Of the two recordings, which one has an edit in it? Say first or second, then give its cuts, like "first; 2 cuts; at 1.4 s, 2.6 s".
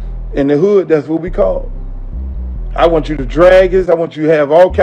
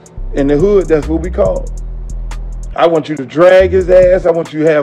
first; 1 cut; at 3.9 s